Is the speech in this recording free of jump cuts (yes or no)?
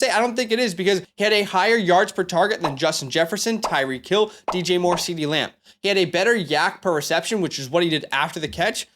no